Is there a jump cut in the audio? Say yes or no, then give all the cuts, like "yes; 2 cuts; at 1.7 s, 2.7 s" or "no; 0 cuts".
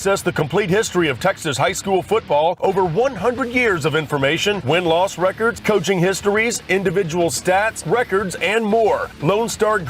no; 0 cuts